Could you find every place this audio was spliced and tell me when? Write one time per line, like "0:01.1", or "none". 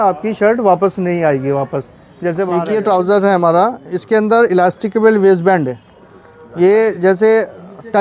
0:02.4